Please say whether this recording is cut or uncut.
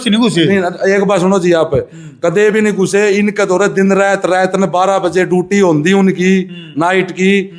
uncut